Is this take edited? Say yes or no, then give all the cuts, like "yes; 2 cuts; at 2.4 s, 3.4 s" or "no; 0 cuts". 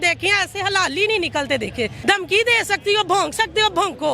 yes; 1 cut; at 2.0 s